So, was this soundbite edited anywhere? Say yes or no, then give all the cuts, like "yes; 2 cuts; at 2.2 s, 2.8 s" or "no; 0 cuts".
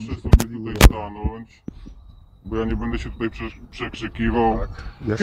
no; 0 cuts